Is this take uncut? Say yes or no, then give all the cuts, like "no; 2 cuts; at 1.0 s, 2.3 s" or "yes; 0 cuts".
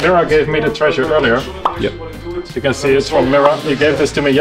yes; 0 cuts